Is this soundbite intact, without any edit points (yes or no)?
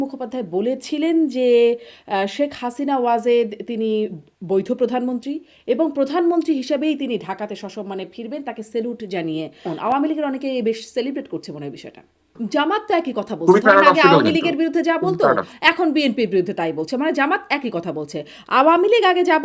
no